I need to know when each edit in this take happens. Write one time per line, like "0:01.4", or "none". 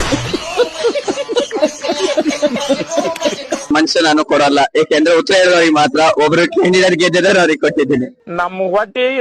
0:03.7